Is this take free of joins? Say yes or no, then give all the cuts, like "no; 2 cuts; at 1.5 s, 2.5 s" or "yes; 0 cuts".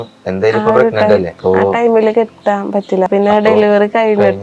no; 2 cuts; at 1.3 s, 3.1 s